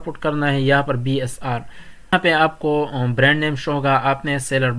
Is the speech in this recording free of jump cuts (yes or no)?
no